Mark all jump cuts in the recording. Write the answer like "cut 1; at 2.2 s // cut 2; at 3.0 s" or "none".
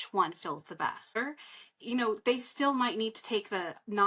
cut 1; at 1.2 s